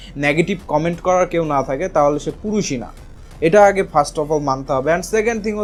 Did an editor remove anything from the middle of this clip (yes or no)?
no